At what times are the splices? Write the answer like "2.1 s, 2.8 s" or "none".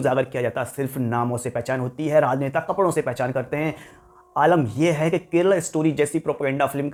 none